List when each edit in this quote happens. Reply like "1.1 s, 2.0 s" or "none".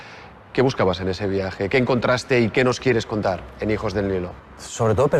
none